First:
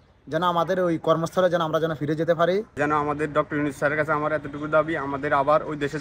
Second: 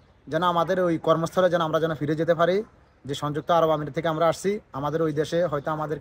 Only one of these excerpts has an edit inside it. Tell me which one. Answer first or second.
first